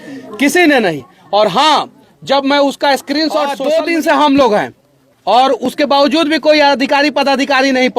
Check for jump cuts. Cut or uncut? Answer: cut